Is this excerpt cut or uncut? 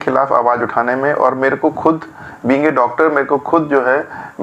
uncut